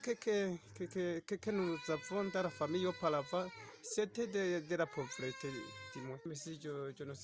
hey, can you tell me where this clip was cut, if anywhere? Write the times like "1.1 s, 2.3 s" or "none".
6.3 s